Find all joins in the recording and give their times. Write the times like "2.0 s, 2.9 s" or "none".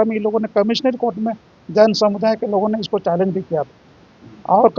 none